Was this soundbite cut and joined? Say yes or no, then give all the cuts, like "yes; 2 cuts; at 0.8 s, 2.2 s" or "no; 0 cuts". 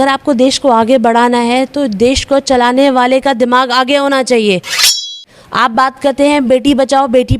yes; 1 cut; at 5.1 s